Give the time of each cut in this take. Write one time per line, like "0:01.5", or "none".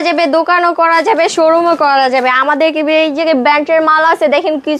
none